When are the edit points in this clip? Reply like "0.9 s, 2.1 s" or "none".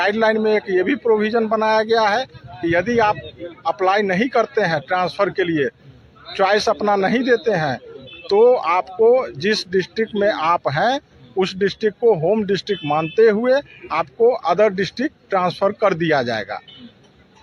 none